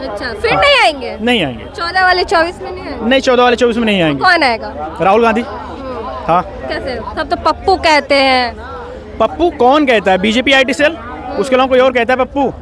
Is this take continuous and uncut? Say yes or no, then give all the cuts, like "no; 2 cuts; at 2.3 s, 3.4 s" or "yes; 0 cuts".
yes; 0 cuts